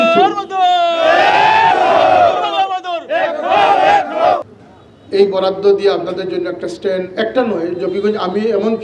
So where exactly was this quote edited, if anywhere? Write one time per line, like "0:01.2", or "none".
0:04.5